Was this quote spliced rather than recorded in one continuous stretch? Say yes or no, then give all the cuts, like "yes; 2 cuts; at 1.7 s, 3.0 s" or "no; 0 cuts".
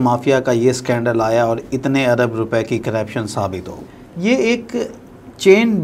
yes; 1 cut; at 3.8 s